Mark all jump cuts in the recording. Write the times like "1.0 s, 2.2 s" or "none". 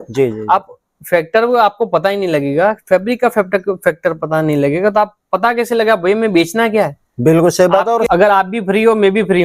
8.0 s